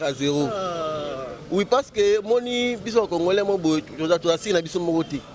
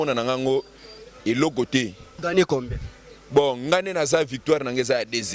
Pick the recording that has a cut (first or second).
second